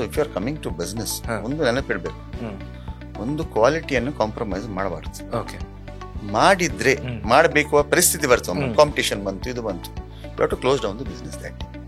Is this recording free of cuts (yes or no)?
yes